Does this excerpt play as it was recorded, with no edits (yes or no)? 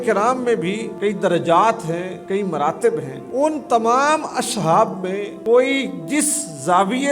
no